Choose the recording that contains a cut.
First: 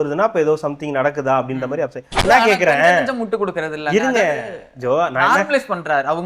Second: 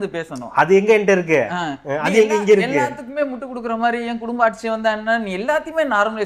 first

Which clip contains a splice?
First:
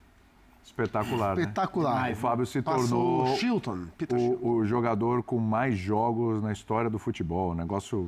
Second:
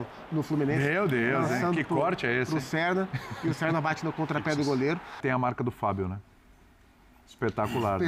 second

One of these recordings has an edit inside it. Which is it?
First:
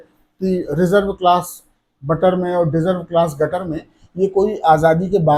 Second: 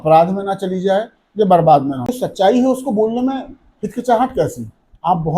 second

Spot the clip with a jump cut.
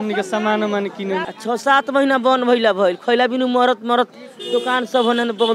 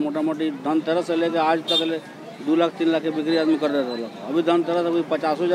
first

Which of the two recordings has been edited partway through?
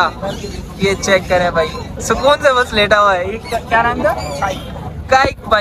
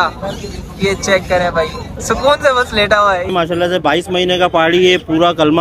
second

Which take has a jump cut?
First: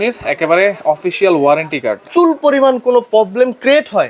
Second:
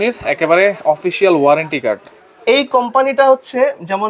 first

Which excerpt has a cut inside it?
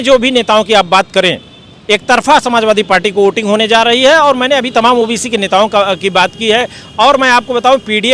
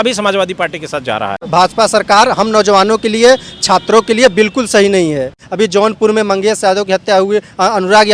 second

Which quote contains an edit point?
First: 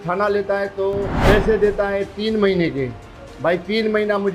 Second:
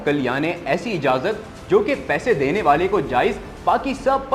first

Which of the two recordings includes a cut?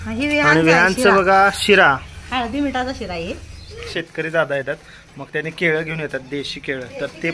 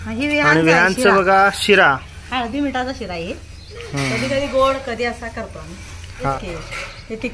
first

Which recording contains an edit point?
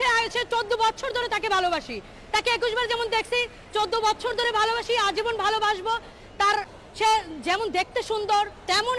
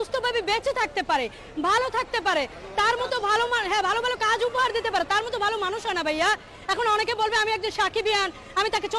first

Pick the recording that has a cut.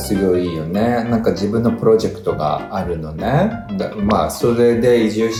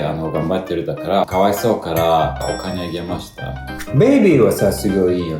second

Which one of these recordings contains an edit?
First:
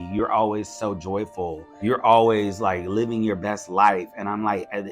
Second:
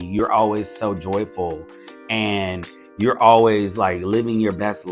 first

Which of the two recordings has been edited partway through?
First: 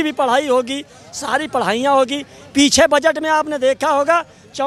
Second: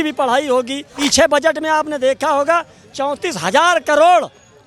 second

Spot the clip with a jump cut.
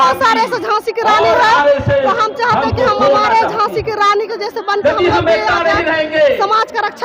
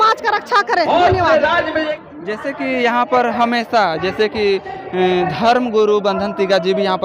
second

